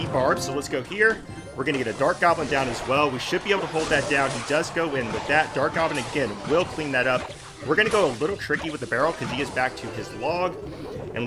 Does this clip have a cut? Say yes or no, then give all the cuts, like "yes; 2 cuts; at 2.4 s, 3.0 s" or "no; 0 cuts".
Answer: no; 0 cuts